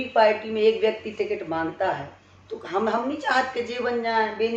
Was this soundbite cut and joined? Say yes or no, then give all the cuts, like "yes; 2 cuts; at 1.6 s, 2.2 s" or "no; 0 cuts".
no; 0 cuts